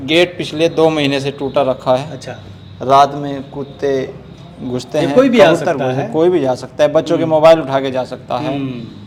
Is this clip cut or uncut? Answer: uncut